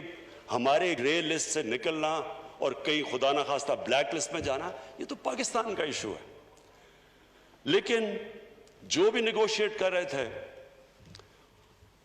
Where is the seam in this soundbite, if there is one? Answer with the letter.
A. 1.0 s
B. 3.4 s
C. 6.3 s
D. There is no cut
A